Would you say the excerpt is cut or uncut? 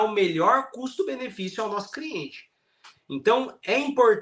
uncut